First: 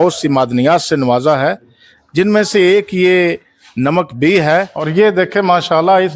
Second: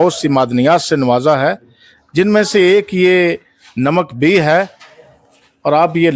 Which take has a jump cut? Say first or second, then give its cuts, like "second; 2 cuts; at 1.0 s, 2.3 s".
first; 1 cut; at 4.7 s